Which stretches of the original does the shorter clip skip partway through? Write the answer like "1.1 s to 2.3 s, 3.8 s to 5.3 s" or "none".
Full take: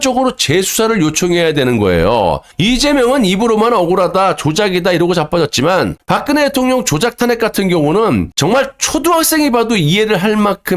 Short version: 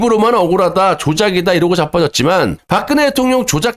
none

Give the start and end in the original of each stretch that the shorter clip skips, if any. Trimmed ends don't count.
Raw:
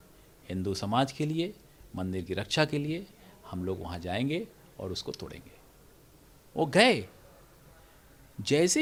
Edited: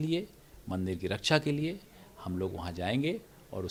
none

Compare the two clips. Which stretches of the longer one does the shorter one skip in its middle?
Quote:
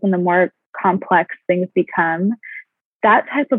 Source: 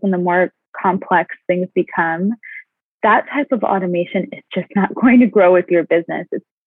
none

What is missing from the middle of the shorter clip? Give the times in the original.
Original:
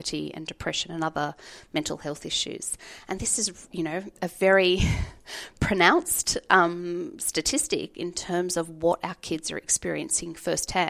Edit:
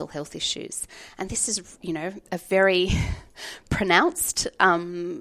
none

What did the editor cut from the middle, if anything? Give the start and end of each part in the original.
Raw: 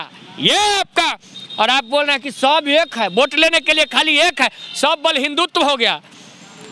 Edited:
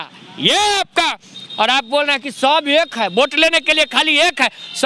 none

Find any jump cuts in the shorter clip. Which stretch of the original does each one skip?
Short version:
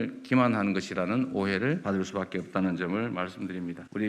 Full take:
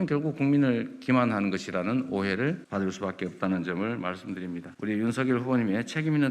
2.6 s to 2.7 s

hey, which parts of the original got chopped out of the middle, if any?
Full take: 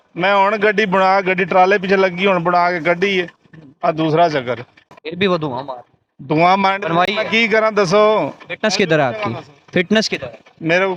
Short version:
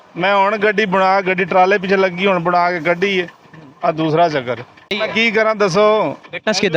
5.0 s to 7.1 s

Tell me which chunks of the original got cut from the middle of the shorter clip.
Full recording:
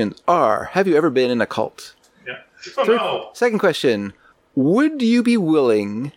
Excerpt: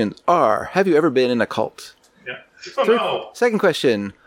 none

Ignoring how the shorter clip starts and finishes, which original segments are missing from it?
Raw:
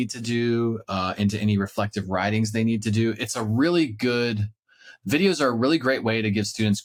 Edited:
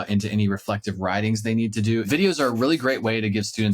3.1 s to 5.1 s

